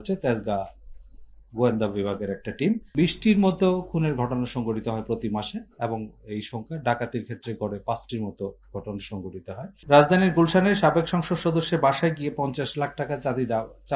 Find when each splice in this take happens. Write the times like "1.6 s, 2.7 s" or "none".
2.9 s, 9.8 s